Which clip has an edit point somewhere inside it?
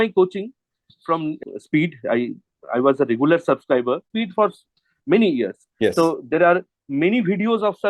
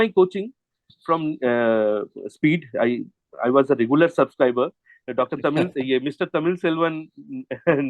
first; 2 cuts; at 1.4 s, 4.1 s

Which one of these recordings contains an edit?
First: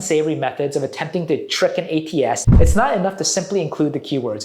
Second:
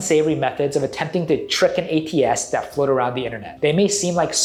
first; 1 cut; at 2.5 s

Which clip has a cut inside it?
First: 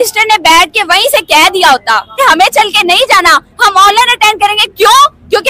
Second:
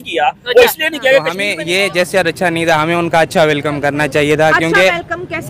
second; 1 cut; at 1.4 s

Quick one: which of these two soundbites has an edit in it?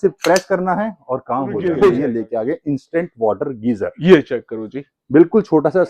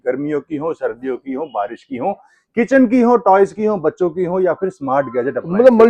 first; 1 cut; at 2.0 s

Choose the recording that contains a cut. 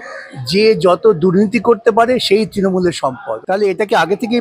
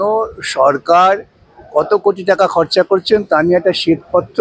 first; 1 cut; at 3.3 s

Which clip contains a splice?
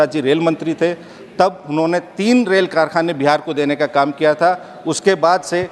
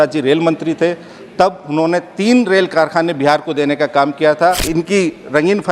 second; 1 cut; at 4.6 s

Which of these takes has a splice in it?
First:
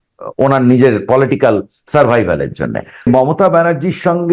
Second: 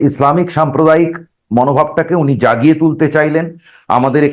first; 1 cut; at 3.1 s

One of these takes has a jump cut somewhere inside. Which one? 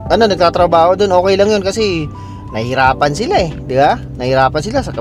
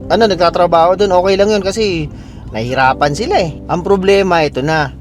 second; 1 cut; at 3.6 s

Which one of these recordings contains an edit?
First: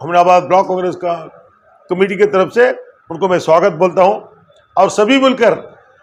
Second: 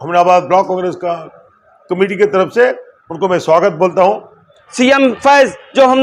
second; 1 cut; at 4.6 s

